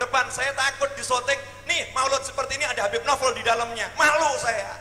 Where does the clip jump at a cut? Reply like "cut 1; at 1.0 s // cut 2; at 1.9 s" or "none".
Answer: none

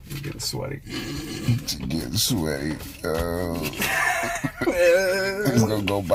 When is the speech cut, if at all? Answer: none

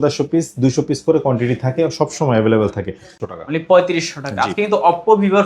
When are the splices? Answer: cut 1; at 3.2 s

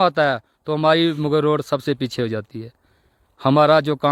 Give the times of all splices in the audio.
none

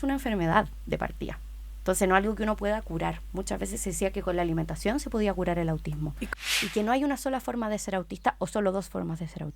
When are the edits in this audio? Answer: cut 1; at 6.2 s

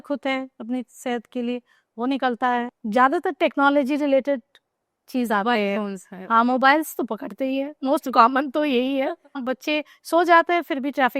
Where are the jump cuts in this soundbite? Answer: cut 1; at 2.7 s // cut 2; at 9.4 s

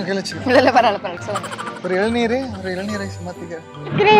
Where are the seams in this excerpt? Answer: cut 1; at 1.2 s

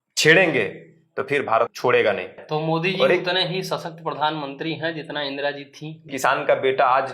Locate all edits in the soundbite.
cut 1; at 1.7 s // cut 2; at 2.4 s // cut 3; at 6.1 s

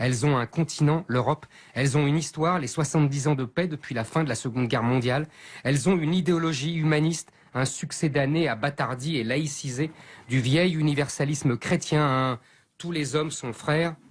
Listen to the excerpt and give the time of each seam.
none

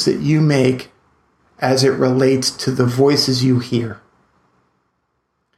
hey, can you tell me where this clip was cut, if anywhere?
cut 1; at 2.6 s

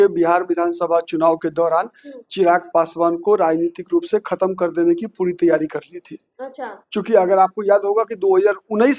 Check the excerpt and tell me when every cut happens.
none

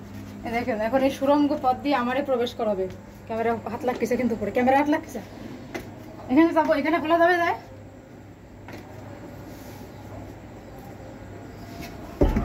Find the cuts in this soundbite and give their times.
none

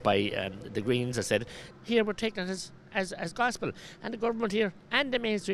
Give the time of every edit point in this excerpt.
cut 1; at 1.7 s

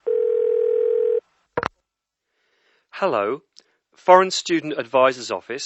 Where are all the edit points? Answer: cut 1; at 1.0 s

